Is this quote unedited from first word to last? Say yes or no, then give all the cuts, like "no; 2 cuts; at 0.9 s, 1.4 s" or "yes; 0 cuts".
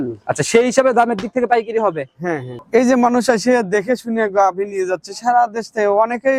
no; 1 cut; at 2.5 s